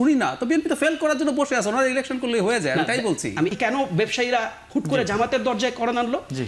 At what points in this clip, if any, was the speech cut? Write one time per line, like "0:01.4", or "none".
0:03.5

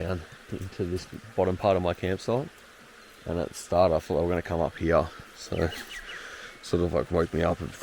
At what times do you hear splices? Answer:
none

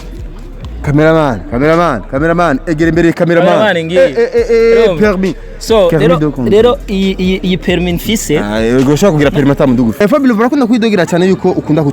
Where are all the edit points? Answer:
0:10.0

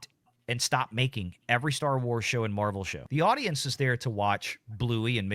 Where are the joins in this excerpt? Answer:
0:02.9

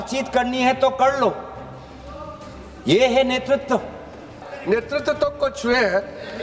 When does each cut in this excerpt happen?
0:04.5

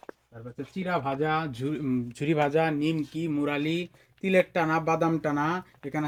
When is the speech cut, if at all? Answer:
none

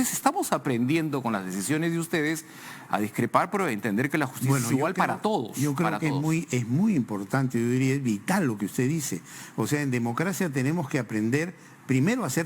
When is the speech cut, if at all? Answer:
none

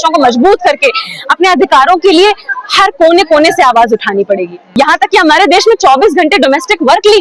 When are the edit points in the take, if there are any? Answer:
0:04.6

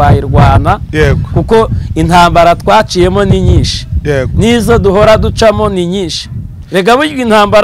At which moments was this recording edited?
none

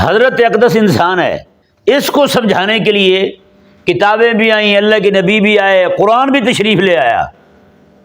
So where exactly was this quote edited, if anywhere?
0:01.6

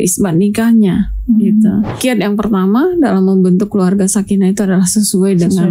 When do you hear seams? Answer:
0:02.0

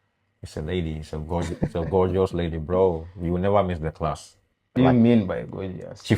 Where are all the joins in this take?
0:04.8

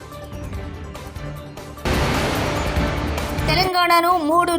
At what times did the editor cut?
0:01.8

